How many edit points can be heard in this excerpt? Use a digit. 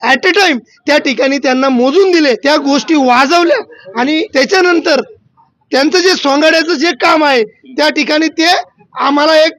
2